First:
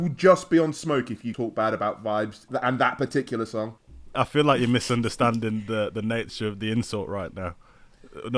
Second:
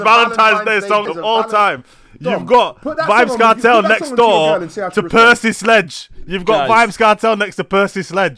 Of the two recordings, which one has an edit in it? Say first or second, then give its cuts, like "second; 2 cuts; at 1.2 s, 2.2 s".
first; 3 cuts; at 1.3 s, 2.4 s, 4.1 s